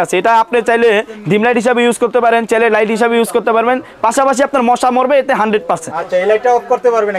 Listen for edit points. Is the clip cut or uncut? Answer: uncut